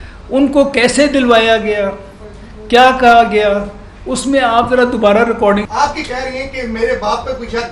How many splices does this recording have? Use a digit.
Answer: 1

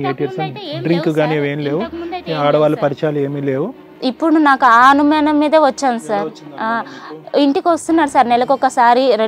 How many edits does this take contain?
0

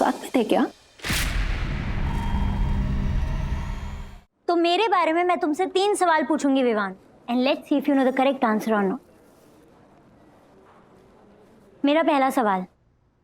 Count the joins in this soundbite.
1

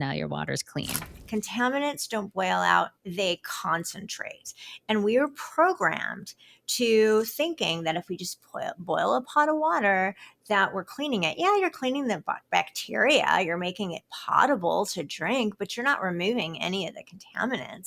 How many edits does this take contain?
1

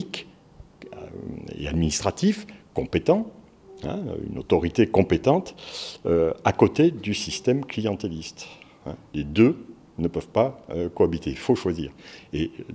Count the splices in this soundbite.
0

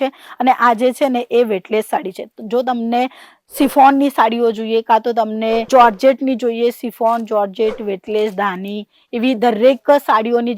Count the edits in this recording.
0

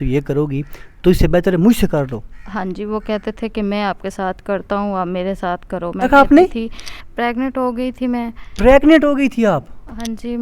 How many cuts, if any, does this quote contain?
1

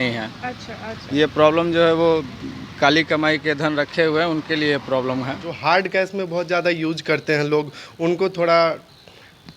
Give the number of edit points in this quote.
1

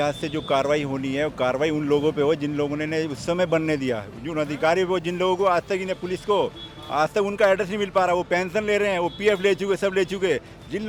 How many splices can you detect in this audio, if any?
0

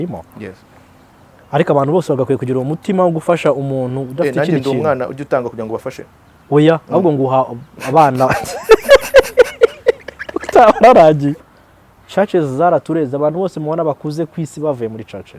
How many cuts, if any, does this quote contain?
1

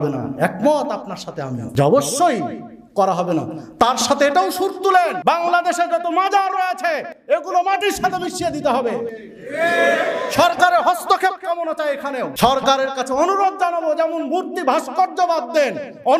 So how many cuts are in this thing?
0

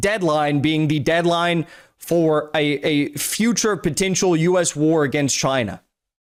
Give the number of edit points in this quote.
0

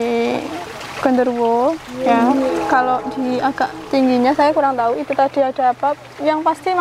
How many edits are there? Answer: 0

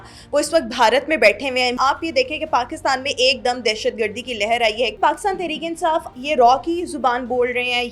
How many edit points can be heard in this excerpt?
3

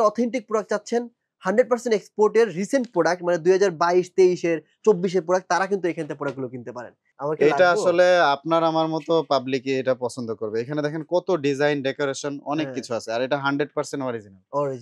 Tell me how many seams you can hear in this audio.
1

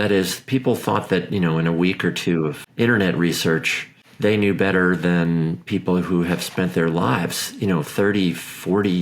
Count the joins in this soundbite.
1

